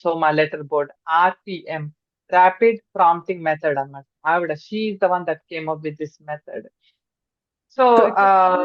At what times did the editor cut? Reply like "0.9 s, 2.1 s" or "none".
none

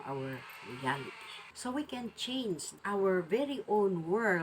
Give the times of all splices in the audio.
1.4 s, 2.7 s

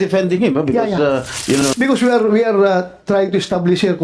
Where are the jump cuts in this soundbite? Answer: 1.6 s

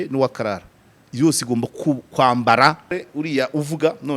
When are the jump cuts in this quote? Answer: 3.0 s

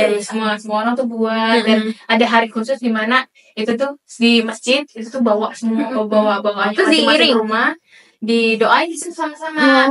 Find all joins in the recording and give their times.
none

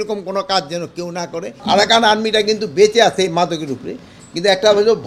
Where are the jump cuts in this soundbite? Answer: 1.5 s

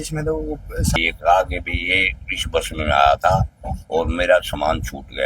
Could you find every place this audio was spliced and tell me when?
0.9 s

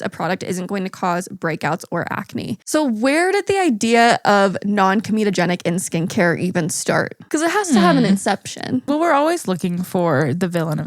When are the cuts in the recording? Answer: 2.6 s, 8.8 s

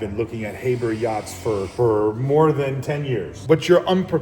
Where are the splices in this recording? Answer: 1.7 s, 3.3 s

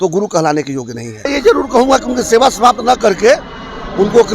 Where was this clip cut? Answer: 1.3 s

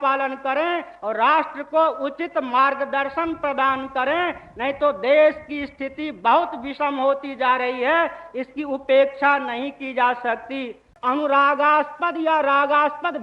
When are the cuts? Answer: 10.9 s

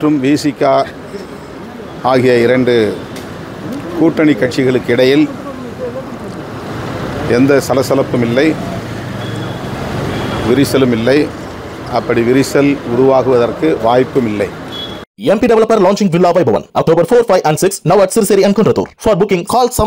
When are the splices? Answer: 15.1 s

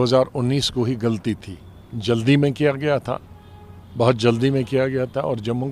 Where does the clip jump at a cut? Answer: none

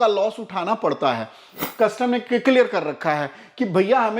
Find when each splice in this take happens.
1.5 s

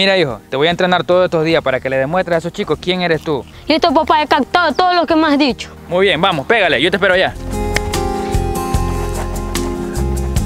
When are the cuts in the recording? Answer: 3.5 s, 7.4 s

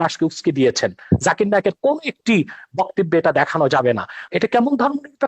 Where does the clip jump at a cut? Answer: 4.2 s

